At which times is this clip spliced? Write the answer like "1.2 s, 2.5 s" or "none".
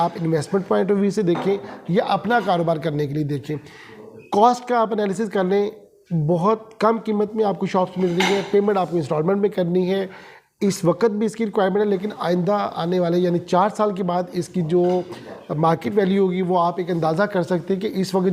none